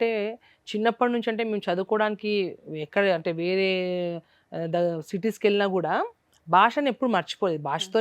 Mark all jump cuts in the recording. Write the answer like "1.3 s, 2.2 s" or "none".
none